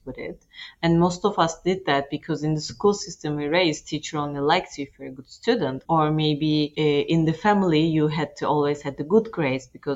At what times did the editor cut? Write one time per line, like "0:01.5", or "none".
0:05.8
0:06.7